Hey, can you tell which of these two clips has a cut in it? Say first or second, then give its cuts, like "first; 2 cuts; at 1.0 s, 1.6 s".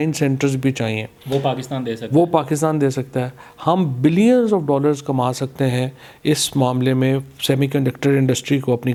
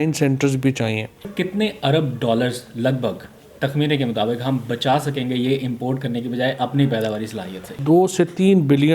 second; 2 cuts; at 1.3 s, 7.7 s